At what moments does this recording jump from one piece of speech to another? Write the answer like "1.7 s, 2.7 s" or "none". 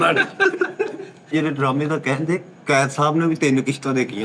1.3 s